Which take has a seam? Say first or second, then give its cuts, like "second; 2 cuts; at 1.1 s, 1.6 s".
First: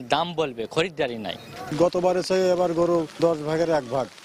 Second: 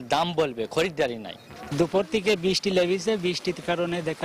second; 1 cut; at 1.5 s